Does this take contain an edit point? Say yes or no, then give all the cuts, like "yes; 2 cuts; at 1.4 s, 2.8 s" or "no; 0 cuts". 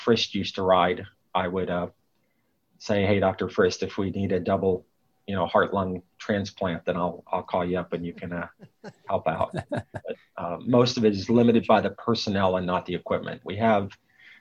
no; 0 cuts